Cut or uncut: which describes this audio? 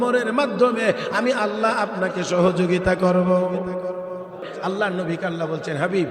cut